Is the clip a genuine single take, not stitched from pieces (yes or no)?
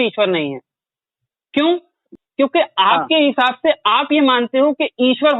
no